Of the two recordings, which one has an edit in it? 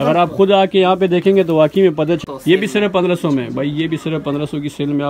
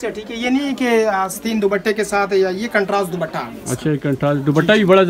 first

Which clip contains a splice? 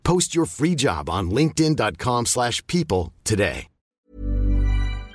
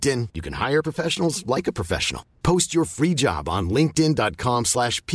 first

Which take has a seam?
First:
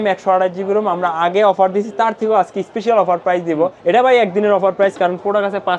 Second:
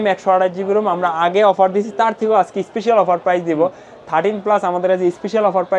first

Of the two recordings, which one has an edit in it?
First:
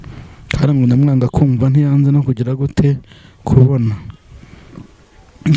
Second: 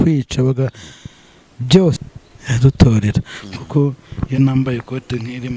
second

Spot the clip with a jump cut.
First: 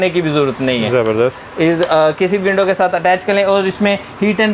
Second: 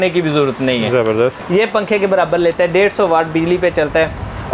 second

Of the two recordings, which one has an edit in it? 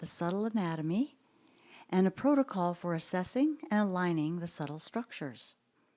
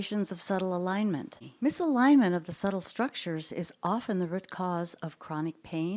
second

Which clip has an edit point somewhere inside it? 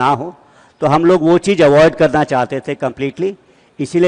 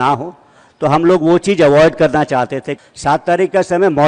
second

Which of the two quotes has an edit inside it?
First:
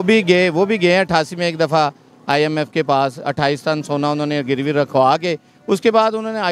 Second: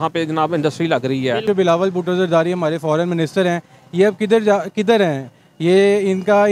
second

